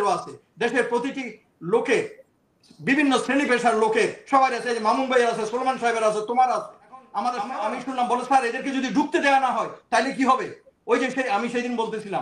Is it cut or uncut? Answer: cut